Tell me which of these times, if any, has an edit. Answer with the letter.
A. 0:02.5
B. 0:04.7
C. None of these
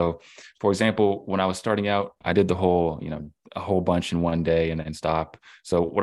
C